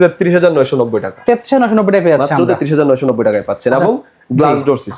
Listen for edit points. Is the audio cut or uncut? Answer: uncut